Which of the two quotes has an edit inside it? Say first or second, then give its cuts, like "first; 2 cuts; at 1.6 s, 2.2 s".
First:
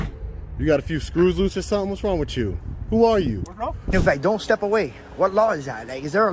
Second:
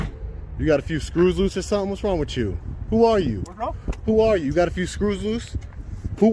first; 1 cut; at 3.9 s